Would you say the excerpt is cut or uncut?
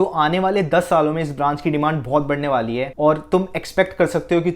uncut